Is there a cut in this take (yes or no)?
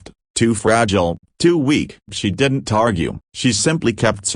yes